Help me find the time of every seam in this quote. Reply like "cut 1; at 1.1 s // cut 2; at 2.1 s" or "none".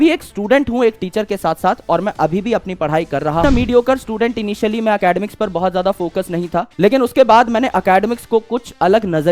cut 1; at 3.4 s